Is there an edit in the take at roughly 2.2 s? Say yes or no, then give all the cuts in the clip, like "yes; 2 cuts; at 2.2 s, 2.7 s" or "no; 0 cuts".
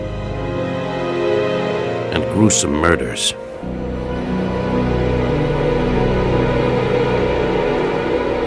yes; 1 cut; at 2.2 s